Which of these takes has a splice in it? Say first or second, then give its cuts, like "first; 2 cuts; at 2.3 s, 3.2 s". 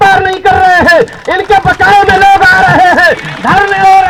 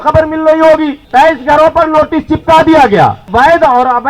second; 2 cuts; at 1.0 s, 3.2 s